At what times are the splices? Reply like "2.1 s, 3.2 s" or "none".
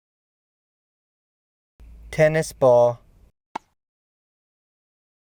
none